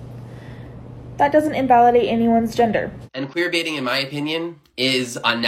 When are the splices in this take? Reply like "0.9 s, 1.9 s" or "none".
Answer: 3.0 s